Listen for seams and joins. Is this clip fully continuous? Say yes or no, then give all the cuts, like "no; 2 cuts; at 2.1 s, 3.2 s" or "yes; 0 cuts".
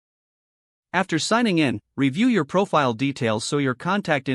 yes; 0 cuts